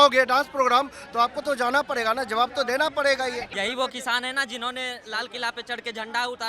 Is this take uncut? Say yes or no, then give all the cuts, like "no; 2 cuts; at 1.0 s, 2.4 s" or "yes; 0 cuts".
no; 1 cut; at 3.5 s